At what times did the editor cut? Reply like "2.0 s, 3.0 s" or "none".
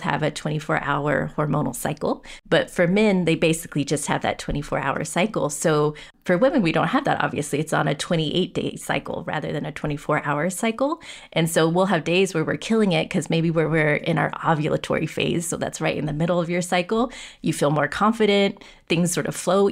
2.3 s, 6.1 s